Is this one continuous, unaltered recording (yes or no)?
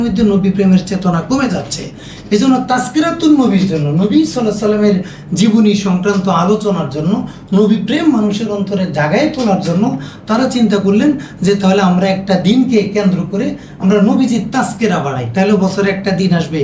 yes